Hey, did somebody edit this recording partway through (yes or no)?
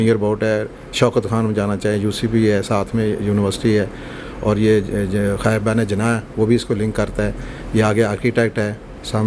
no